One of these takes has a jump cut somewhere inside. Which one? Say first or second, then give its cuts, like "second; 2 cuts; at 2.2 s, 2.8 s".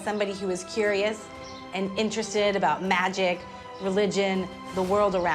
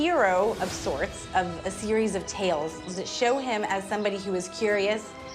second; 2 cuts; at 1.2 s, 2.9 s